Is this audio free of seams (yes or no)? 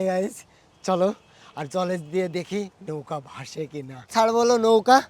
no